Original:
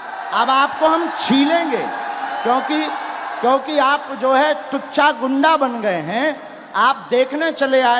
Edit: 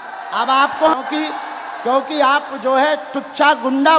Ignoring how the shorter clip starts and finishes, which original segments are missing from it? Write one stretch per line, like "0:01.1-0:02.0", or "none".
0:01.0-0:02.5